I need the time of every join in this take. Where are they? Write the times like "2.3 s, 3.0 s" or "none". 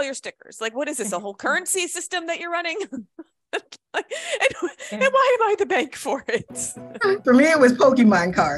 7.2 s